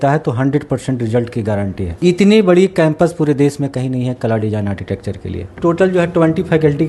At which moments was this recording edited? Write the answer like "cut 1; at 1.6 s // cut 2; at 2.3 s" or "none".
cut 1; at 1.8 s // cut 2; at 5.6 s

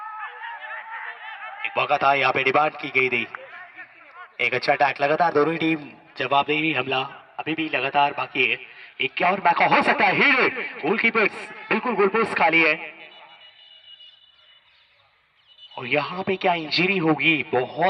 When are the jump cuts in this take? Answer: none

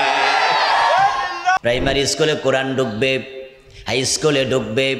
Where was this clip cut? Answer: cut 1; at 1.6 s

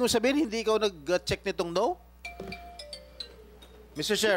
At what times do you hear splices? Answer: cut 1; at 2.2 s

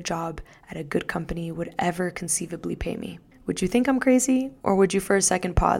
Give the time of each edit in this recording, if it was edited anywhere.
cut 1; at 4.5 s

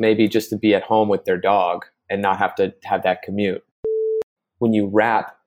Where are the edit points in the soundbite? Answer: cut 1; at 4.1 s

